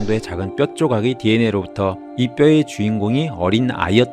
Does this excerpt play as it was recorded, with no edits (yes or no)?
yes